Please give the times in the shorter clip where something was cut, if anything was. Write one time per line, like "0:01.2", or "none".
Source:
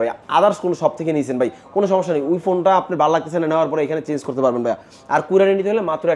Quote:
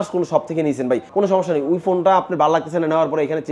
0:01.1

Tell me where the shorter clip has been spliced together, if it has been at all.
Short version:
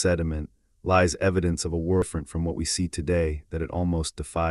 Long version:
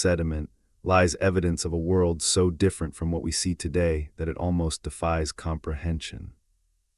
0:02.0

